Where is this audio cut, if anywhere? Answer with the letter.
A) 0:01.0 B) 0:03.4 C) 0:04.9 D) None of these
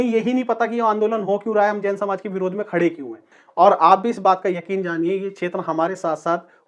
B